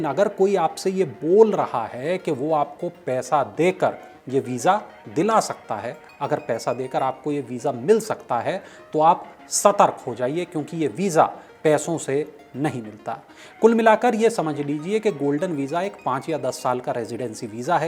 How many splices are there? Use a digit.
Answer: 0